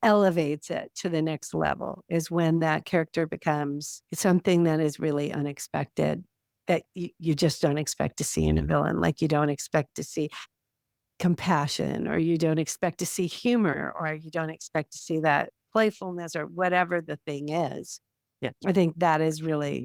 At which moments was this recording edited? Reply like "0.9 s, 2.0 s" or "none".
none

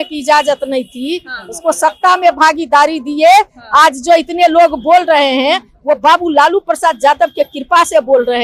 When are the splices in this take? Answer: none

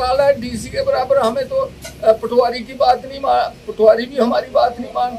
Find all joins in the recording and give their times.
none

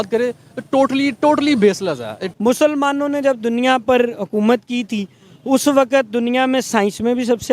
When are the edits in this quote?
2.2 s

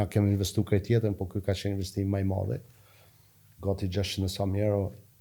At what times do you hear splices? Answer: none

